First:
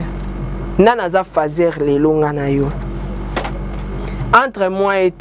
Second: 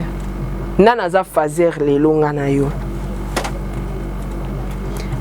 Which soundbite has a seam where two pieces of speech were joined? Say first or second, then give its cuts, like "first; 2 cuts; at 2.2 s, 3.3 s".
first; 1 cut; at 3.7 s